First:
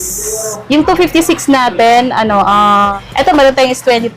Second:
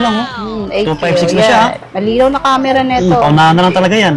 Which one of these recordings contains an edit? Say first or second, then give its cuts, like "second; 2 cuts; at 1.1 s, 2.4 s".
first; 1 cut; at 2.9 s